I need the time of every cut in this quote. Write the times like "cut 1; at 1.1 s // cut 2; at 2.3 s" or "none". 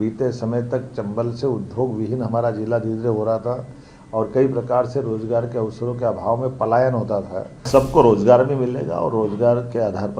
cut 1; at 7.6 s